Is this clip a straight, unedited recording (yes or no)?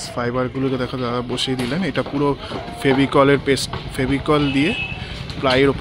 yes